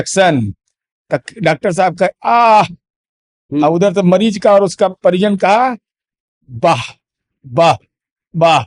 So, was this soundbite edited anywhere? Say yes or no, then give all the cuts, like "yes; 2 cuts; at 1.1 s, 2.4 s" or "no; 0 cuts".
no; 0 cuts